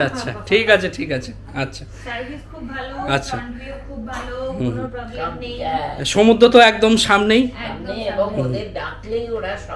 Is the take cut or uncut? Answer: uncut